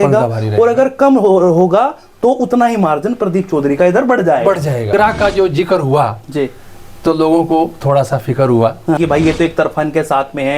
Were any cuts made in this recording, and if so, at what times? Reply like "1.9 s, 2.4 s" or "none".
4.9 s, 9.0 s

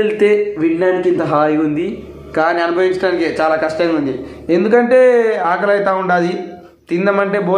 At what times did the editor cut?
none

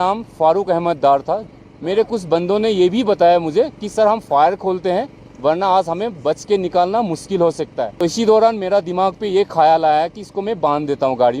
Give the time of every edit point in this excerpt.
1.5 s, 7.9 s

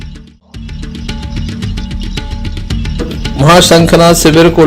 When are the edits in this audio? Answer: 1.0 s

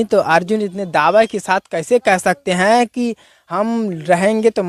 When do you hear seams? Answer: none

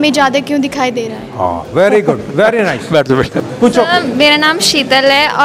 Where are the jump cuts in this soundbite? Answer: 3.4 s

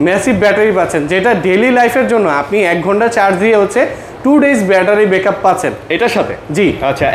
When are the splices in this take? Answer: none

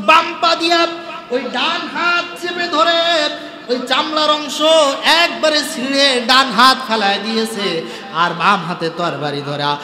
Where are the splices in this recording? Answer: none

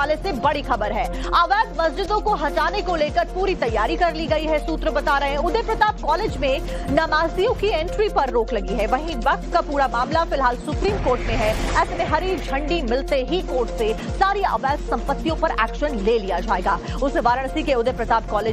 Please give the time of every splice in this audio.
none

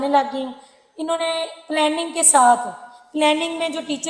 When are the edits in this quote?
none

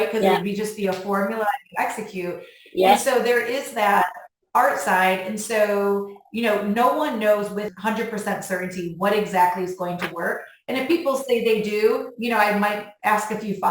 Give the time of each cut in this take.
7.7 s

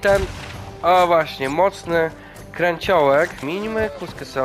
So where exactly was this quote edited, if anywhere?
3.5 s

